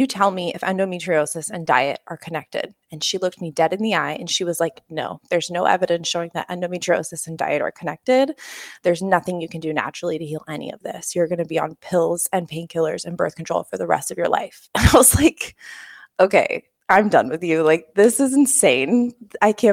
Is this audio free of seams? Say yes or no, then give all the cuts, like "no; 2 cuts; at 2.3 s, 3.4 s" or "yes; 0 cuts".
yes; 0 cuts